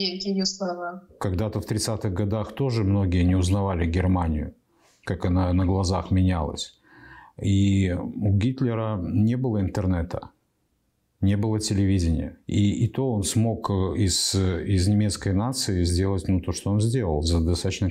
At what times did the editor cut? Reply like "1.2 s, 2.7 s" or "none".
none